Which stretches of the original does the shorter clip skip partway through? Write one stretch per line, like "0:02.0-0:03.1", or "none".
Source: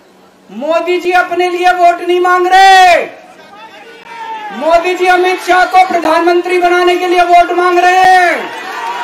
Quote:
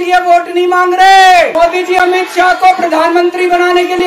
0:03.0-0:04.6